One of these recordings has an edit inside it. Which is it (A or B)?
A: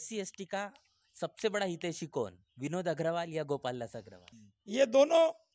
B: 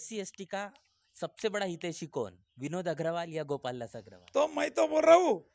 A